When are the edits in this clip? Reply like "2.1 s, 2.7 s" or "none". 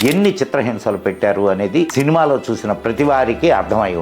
1.9 s